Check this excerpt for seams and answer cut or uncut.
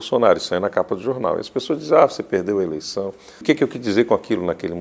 cut